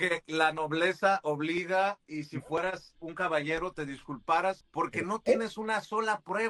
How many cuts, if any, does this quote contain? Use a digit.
1